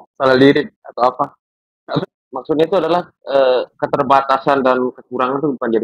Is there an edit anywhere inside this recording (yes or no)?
yes